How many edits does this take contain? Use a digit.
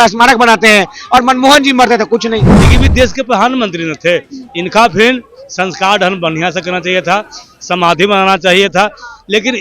1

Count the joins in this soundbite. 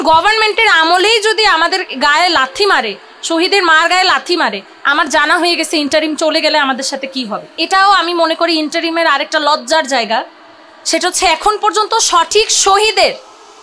1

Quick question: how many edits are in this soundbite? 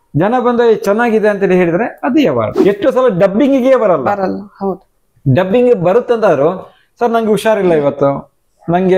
1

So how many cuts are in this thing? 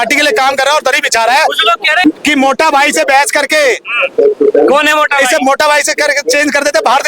1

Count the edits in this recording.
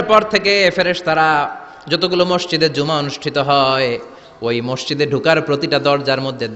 0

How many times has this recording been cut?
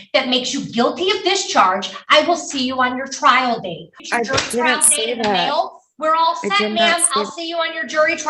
1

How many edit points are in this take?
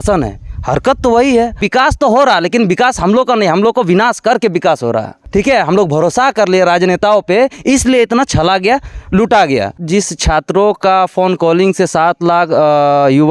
3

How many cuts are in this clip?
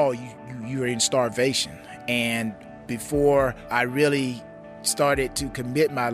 2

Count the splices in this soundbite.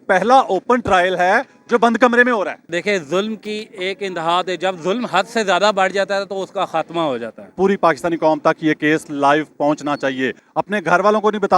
3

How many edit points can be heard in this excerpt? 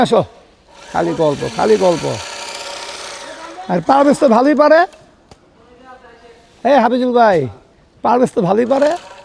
0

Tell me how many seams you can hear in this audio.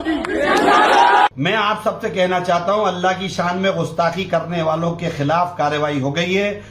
1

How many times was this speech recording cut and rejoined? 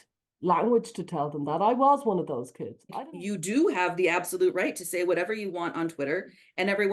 1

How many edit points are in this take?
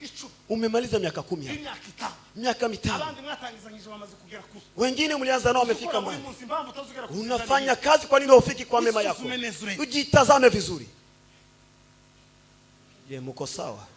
1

